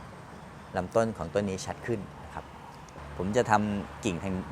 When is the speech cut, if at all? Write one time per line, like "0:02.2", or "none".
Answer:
0:03.0